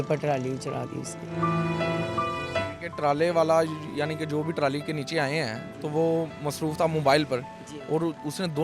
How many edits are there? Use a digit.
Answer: 0